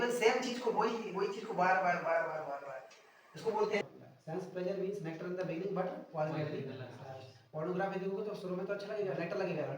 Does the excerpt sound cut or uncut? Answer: cut